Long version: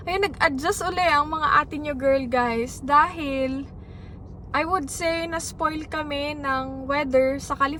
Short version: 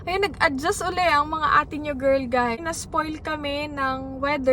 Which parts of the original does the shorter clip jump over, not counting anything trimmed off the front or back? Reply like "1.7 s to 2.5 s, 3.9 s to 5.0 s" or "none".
2.6 s to 5.2 s